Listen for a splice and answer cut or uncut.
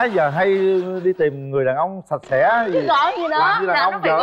uncut